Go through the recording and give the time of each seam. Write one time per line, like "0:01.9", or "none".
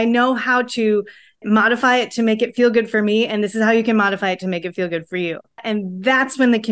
0:05.6

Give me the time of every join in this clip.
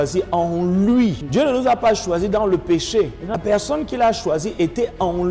0:01.2
0:03.4

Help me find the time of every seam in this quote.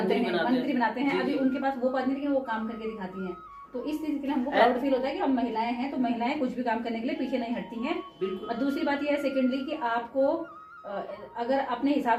none

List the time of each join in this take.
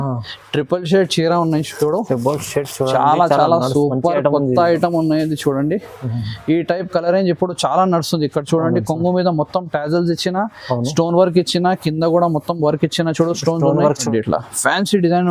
0:14.0

